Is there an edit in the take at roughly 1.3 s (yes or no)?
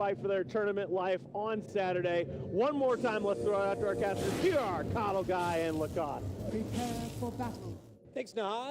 yes